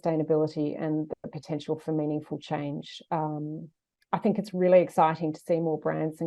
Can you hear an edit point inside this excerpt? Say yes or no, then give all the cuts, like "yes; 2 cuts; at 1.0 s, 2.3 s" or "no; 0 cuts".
no; 0 cuts